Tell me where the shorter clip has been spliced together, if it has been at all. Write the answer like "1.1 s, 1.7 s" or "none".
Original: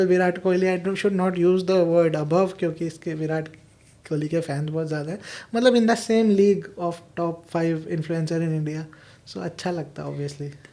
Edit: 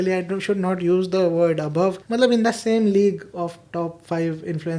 2.0 s